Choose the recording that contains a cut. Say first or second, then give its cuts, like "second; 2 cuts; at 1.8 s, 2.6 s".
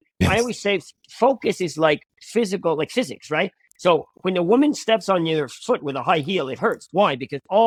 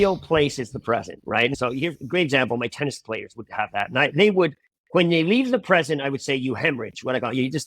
second; 1 cut; at 1.6 s